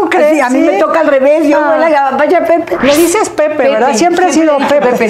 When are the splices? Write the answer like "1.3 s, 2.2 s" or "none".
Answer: 2.8 s